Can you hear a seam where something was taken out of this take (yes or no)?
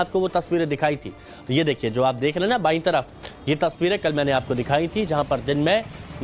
no